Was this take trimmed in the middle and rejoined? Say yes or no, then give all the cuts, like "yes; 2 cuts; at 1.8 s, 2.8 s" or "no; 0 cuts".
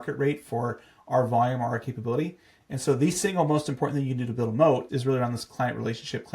yes; 1 cut; at 4.8 s